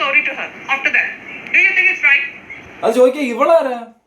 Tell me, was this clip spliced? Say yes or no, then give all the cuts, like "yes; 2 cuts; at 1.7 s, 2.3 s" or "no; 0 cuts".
yes; 1 cut; at 2.7 s